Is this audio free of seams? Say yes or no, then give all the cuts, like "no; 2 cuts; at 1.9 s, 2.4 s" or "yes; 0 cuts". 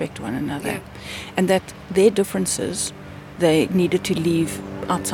yes; 0 cuts